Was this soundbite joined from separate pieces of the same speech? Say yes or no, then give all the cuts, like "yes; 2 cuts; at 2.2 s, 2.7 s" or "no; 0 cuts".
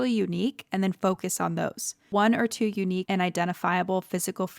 yes; 2 cuts; at 2.1 s, 3.0 s